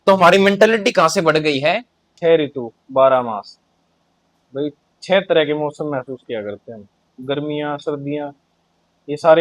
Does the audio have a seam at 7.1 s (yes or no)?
yes